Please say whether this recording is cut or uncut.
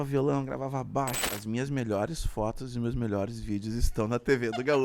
cut